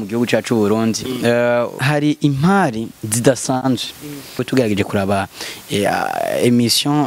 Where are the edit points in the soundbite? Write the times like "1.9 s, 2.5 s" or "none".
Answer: 1.8 s, 4.4 s